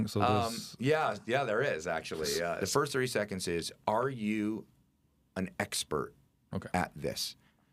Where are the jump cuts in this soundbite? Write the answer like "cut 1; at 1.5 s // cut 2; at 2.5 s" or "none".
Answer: cut 1; at 2.6 s